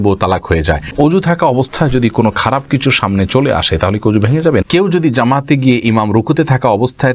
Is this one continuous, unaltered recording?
no; 2 cuts; at 0.9 s, 4.6 s

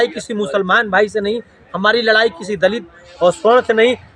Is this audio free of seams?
yes; 0 cuts

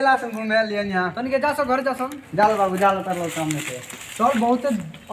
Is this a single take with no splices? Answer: yes; 0 cuts

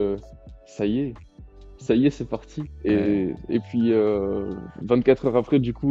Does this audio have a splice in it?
no; 0 cuts

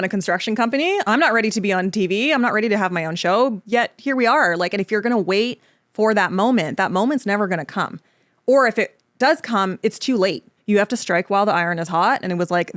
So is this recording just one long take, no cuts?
no; 2 cuts; at 3.6 s, 10.5 s

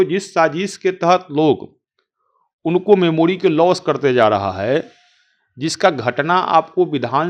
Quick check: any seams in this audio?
no; 0 cuts

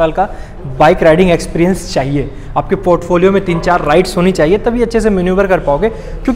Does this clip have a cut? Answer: no; 0 cuts

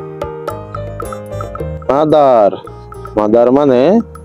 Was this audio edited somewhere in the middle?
yes; 1 cut; at 1.8 s

